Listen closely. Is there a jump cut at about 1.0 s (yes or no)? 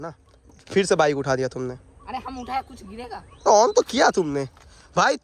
no